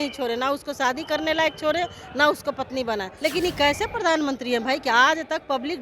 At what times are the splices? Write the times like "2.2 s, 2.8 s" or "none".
3.1 s